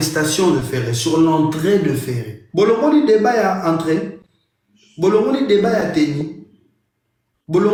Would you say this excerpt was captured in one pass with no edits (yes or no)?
yes